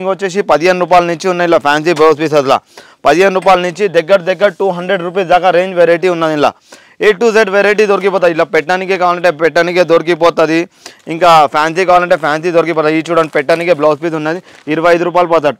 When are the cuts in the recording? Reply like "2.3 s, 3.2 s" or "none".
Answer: none

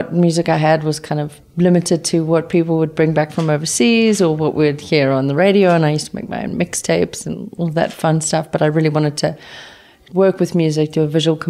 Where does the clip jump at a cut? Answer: none

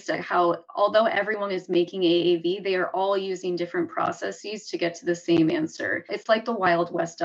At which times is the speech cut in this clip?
6.1 s

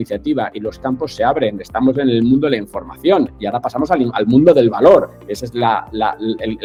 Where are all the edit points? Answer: none

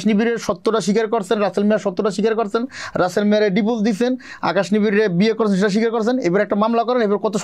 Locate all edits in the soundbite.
none

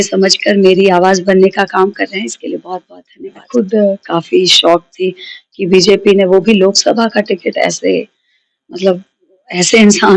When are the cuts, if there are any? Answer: 3.5 s

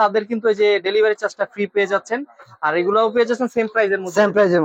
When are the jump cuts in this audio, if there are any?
none

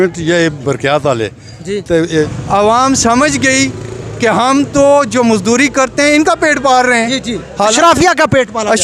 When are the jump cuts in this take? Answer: 2.2 s

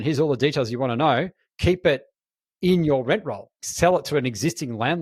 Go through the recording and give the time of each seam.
3.6 s

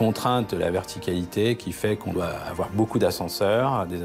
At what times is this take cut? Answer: 2.2 s

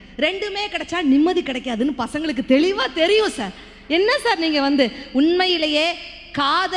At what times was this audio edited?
none

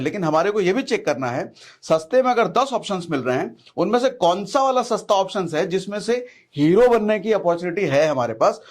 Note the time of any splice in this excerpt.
none

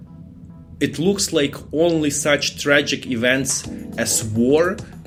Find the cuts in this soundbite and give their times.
none

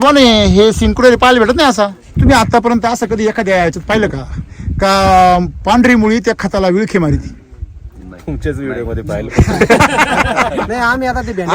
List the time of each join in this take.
2.1 s

